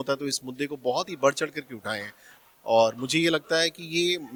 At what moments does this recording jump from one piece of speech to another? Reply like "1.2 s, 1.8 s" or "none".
none